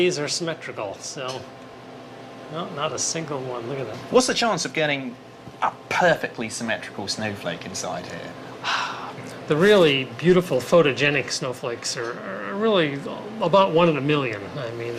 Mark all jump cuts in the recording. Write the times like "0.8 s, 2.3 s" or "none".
14.0 s